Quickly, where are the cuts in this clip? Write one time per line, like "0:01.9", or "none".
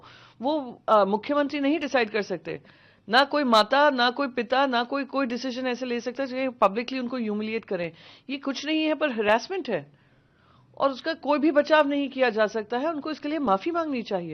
none